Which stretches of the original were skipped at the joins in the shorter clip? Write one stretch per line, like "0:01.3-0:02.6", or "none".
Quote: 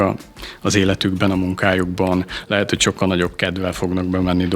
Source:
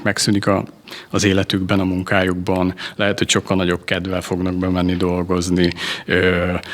none